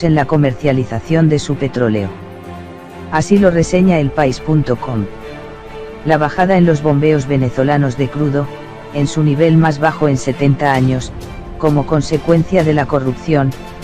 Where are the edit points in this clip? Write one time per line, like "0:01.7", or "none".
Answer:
0:09.6